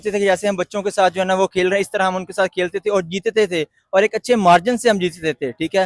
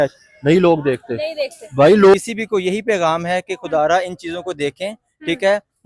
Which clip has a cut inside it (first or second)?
second